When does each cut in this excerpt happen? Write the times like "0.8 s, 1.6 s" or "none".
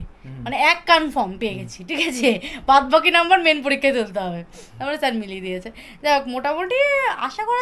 none